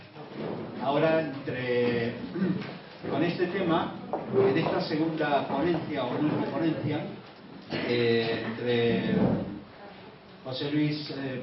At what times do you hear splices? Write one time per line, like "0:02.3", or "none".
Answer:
0:08.1